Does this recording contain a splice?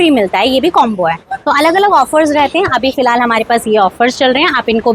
no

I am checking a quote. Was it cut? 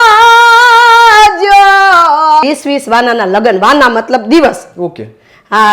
yes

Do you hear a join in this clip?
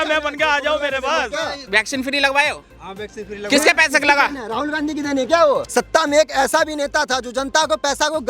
yes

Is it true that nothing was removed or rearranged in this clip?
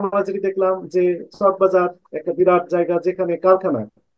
yes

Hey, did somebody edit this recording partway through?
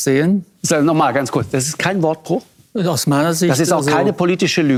no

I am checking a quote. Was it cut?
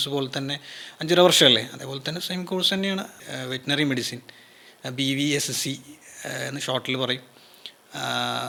no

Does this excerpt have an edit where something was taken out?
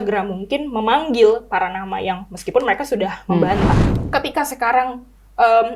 yes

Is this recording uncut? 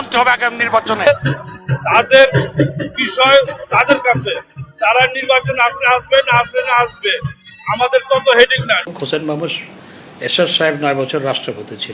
no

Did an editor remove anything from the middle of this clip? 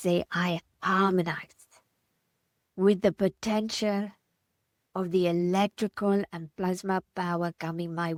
no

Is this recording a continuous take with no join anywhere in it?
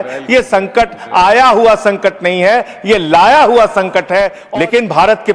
no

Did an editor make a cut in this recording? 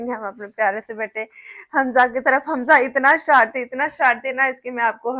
no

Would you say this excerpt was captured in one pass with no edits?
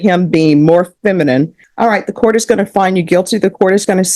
no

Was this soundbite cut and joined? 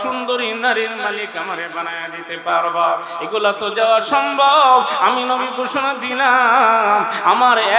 no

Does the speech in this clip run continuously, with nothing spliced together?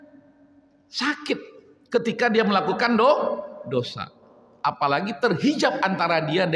yes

